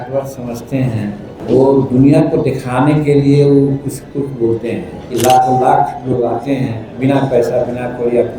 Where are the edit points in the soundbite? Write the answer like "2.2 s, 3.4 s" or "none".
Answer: 1.4 s, 4.9 s